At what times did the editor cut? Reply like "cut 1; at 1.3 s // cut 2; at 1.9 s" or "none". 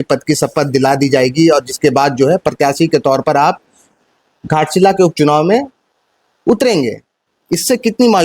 cut 1; at 7.2 s